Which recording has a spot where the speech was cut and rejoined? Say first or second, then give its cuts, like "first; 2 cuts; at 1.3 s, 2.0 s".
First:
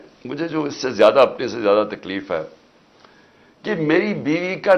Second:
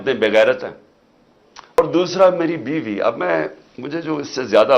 second; 1 cut; at 1.8 s